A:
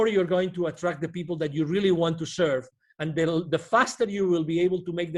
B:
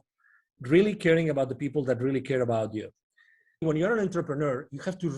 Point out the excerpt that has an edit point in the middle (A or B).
B